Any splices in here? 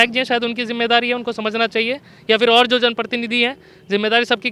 no; 0 cuts

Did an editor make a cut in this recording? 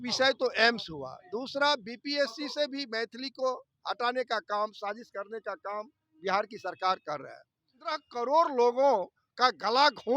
yes; 1 cut; at 8.1 s

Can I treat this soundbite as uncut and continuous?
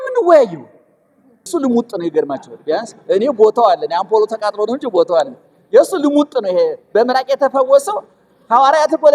no; 1 cut; at 1.5 s

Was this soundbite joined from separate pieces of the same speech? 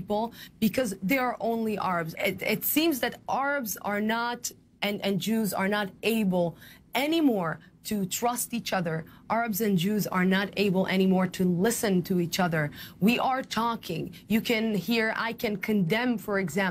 yes; 1 cut; at 1.7 s

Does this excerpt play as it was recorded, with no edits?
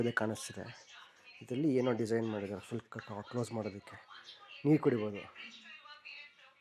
yes; 0 cuts

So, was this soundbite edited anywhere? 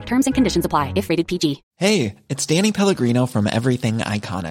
yes; 1 cut; at 1.7 s

